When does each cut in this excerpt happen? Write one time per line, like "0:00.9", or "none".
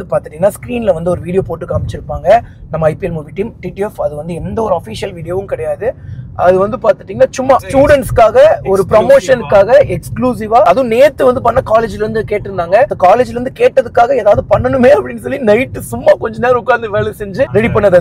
0:07.7
0:10.7